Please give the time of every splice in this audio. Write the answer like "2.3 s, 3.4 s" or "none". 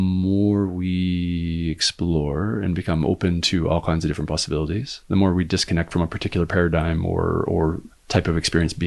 7.9 s